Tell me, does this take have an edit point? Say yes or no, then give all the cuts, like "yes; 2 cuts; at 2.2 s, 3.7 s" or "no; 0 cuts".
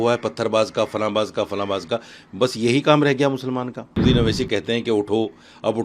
yes; 1 cut; at 4.0 s